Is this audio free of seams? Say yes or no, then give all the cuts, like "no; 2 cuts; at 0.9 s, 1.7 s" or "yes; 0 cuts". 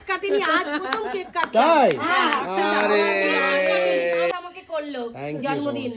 no; 1 cut; at 4.3 s